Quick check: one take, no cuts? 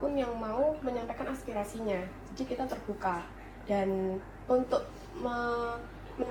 yes; 0 cuts

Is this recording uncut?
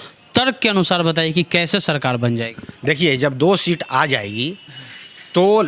yes; 0 cuts

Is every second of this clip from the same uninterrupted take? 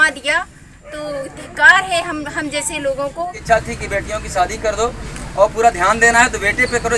no; 1 cut; at 3.4 s

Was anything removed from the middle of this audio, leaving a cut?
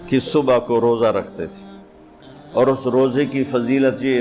no; 0 cuts

